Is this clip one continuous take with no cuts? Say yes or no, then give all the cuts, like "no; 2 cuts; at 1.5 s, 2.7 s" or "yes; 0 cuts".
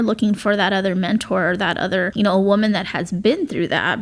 no; 1 cut; at 2.1 s